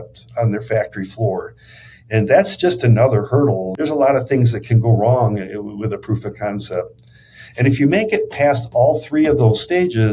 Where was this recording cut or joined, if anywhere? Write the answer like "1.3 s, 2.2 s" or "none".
3.7 s